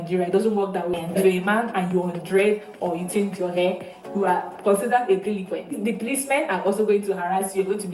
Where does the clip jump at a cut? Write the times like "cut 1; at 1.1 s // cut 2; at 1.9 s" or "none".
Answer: cut 1; at 0.9 s